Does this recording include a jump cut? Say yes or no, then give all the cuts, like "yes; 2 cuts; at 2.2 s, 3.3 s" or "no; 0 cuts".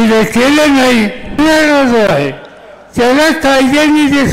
yes; 1 cut; at 1.4 s